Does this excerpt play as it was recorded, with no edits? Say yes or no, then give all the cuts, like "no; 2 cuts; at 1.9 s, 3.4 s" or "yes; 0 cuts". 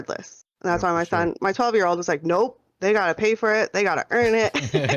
yes; 0 cuts